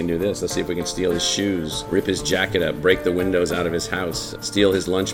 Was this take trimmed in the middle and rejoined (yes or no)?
no